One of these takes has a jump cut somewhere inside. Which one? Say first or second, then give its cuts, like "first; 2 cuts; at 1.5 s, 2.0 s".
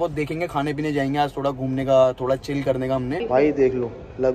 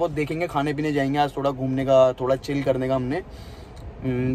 first; 1 cut; at 3.2 s